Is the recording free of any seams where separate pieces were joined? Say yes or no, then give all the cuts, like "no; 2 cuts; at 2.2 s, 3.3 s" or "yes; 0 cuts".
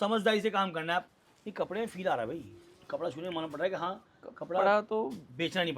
no; 1 cut; at 1.1 s